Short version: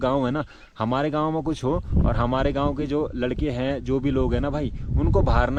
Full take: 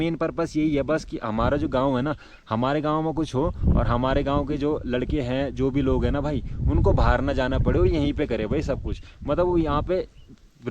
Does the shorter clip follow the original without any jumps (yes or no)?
yes